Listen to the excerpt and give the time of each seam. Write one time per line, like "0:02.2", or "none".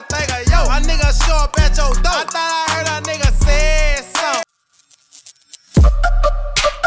0:04.4

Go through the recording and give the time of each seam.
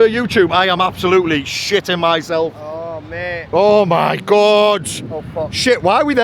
0:03.4

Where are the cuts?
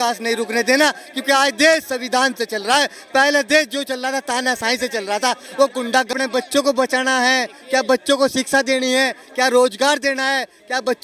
0:06.1

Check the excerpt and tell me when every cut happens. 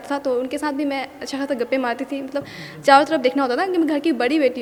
none

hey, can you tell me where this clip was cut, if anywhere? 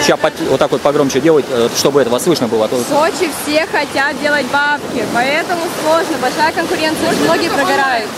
none

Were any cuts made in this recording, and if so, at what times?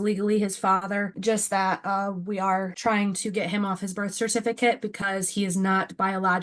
0:01.1
0:02.7

